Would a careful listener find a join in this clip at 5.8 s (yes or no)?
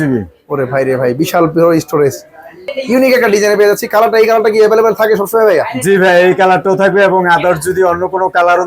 no